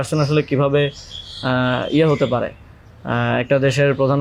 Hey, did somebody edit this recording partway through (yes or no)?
no